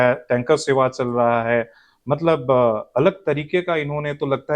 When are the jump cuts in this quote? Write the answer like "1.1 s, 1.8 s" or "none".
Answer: none